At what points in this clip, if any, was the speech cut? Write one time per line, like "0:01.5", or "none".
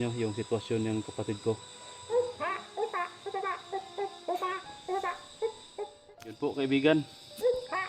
0:06.0